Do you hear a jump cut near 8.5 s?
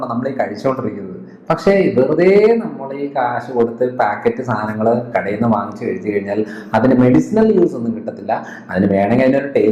no; 0 cuts

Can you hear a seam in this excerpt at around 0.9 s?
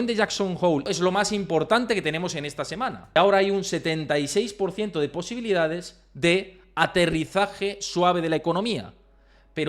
yes; 2 cuts; at 0.9 s, 3.2 s

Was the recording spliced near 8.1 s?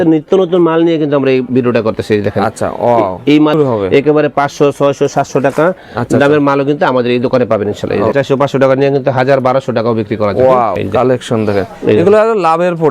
yes; 3 cuts; at 3.5 s, 8.1 s, 10.8 s

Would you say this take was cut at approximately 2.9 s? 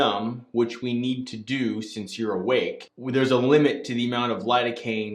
yes; 1 cut; at 2.9 s

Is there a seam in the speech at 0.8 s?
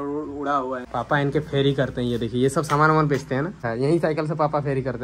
yes; 2 cuts; at 0.8 s, 3.6 s

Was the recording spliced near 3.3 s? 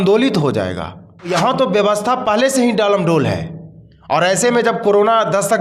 no; 1 cut; at 1.3 s

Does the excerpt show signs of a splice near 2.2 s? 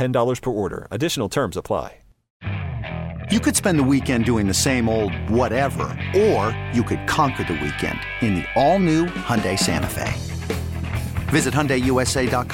yes; 1 cut; at 2.2 s

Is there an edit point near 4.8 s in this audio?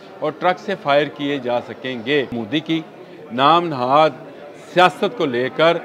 no; 1 cut; at 2.4 s

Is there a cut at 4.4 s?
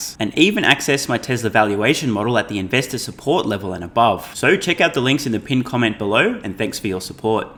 no; 0 cuts

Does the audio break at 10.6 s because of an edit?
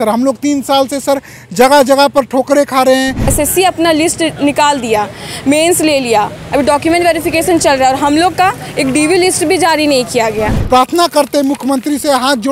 yes; 2 cuts; at 3.3 s, 10.6 s

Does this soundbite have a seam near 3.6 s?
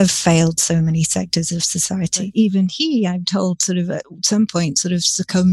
no; 1 cut; at 2.3 s

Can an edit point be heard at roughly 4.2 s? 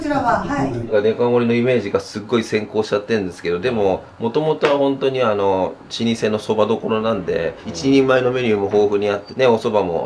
no; 0 cuts

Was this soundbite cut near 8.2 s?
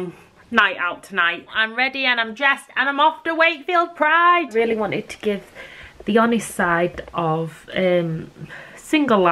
no; 2 cuts; at 1.6 s, 4.5 s

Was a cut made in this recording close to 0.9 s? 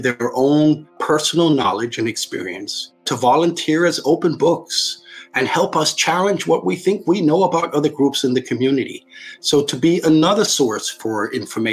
yes; 2 cuts; at 0.9 s, 3.1 s

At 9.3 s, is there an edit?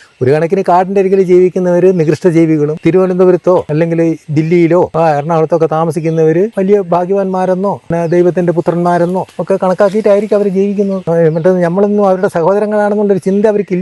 yes; 7 cuts; at 2.8 s, 3.7 s, 4.9 s, 6.5 s, 7.9 s, 9.3 s, 11.0 s

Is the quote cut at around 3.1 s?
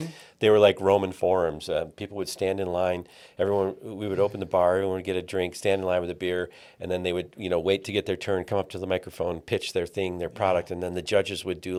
no; 0 cuts

